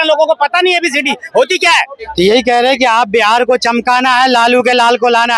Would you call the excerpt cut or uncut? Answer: cut